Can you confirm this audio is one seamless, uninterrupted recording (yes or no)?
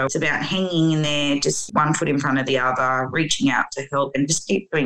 yes